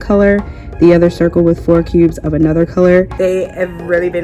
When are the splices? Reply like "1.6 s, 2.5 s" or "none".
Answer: 3.1 s